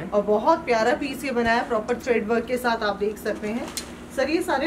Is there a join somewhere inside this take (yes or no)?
no